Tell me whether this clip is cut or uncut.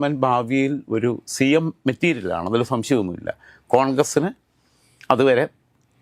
uncut